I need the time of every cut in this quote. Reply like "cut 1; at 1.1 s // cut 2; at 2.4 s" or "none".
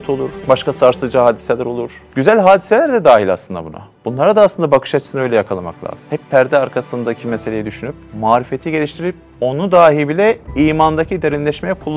none